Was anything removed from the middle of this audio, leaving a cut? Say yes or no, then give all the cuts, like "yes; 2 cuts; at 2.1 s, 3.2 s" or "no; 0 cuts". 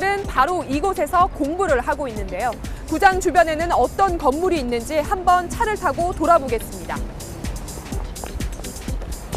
no; 0 cuts